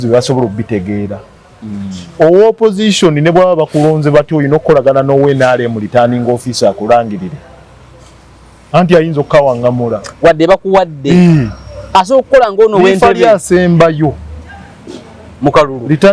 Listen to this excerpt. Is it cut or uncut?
uncut